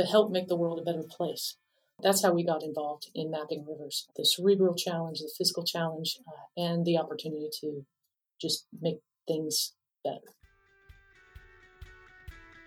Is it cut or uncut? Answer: cut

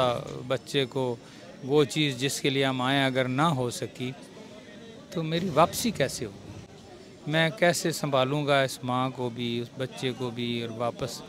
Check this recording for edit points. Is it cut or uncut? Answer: uncut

